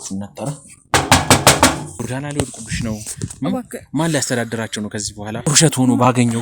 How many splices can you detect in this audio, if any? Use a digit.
2